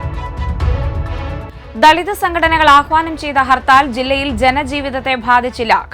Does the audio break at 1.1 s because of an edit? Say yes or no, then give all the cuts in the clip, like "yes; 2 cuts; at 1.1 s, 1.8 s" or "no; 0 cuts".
yes; 1 cut; at 1.1 s